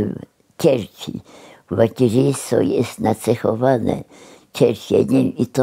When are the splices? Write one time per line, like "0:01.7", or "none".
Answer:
none